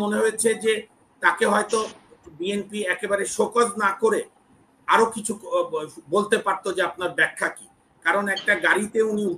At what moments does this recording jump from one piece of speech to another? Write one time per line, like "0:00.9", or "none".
none